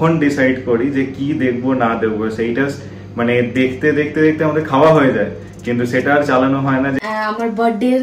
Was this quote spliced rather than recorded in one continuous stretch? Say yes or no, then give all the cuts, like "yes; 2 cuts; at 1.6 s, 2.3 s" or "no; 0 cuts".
yes; 1 cut; at 7.0 s